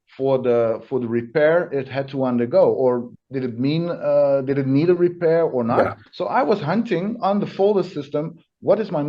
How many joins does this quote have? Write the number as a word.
two